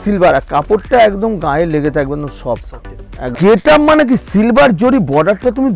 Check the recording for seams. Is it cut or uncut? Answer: cut